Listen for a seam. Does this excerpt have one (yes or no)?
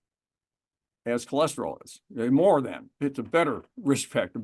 yes